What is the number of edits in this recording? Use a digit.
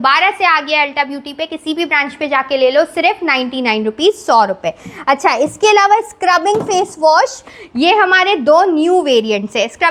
0